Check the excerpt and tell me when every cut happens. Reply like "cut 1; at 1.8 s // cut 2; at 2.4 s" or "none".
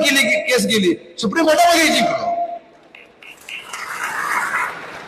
none